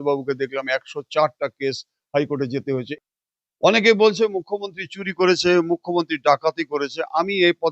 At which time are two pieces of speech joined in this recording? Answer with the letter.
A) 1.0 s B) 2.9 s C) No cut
B